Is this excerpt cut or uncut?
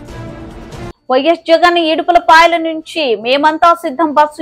uncut